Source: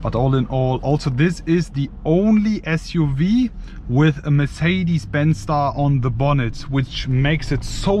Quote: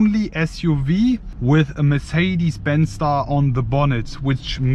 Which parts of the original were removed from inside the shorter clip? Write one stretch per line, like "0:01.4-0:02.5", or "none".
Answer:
0:03.6-0:03.8